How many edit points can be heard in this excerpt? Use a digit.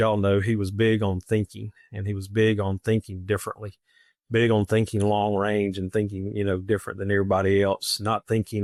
0